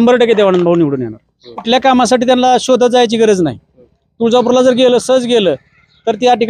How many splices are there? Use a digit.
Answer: 1